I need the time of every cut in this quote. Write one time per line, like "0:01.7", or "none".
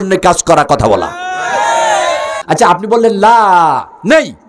0:02.4